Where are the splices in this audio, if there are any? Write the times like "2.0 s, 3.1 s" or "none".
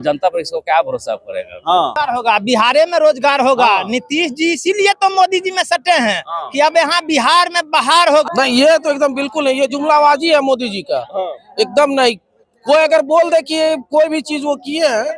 1.9 s, 8.3 s